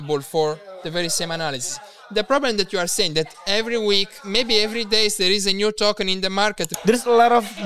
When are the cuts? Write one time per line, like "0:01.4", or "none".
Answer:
0:06.7